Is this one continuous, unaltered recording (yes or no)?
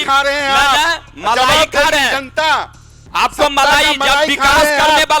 yes